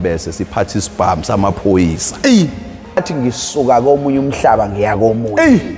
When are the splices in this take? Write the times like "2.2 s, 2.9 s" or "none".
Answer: 3.0 s